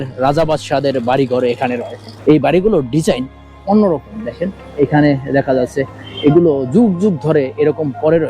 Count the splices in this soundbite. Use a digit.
1